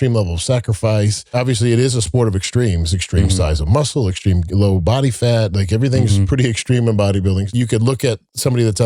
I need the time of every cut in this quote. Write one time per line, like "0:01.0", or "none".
0:01.3
0:07.5